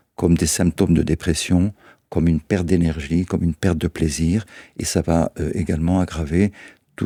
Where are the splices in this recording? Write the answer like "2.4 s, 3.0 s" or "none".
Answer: none